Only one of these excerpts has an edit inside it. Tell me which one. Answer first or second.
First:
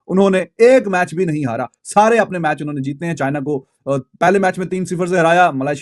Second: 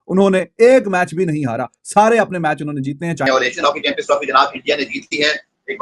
second